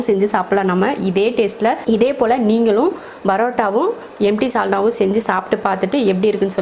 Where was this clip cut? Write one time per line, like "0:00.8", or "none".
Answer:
0:01.8